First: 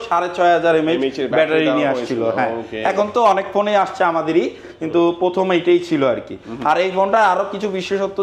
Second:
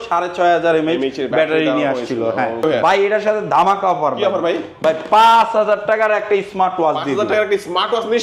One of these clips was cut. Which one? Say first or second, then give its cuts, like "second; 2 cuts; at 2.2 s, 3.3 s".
second; 1 cut; at 2.6 s